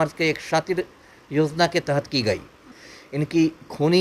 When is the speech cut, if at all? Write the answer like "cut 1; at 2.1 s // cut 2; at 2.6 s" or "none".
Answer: cut 1; at 2.7 s